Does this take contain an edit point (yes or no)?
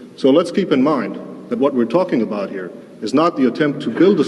yes